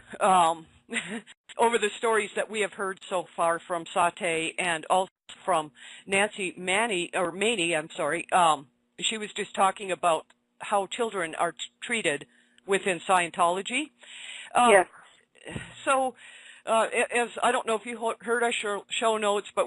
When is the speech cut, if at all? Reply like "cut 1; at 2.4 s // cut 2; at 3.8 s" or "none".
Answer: cut 1; at 18.2 s